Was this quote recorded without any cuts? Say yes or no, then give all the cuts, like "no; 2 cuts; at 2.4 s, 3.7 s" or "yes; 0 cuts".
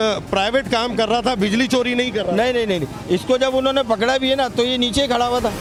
yes; 0 cuts